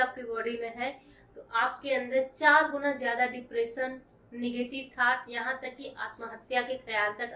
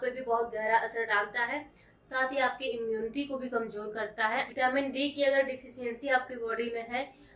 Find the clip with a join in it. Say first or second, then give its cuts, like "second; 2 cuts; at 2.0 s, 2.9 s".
second; 1 cut; at 4.5 s